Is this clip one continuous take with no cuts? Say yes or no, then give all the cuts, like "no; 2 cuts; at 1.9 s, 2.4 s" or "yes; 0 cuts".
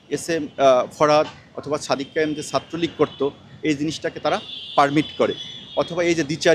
yes; 0 cuts